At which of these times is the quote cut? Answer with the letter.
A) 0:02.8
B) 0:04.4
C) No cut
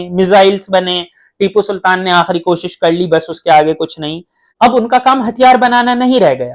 B